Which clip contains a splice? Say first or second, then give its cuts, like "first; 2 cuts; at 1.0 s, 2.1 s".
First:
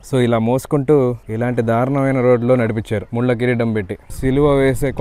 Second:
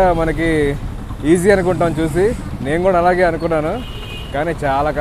first; 3 cuts; at 1.3 s, 3.1 s, 4.0 s